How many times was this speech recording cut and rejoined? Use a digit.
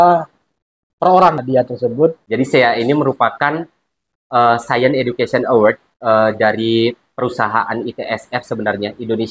3